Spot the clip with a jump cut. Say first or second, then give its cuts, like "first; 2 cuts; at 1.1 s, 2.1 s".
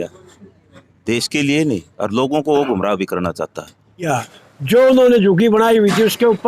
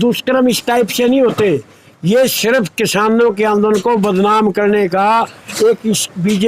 first; 1 cut; at 4.1 s